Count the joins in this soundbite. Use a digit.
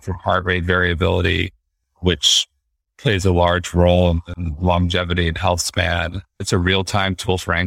1